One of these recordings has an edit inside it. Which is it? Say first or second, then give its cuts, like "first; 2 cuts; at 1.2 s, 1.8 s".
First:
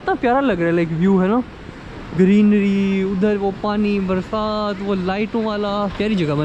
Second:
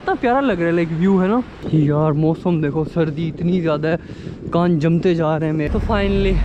second; 2 cuts; at 1.6 s, 5.7 s